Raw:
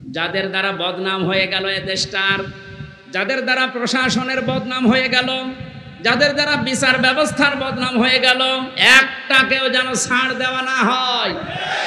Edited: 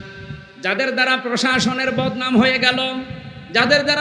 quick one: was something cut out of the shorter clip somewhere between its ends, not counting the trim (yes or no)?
no